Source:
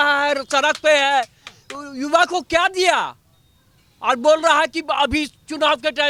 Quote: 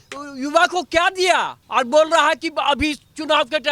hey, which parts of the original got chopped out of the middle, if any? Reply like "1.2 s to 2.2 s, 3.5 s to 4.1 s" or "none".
3.1 s to 3.9 s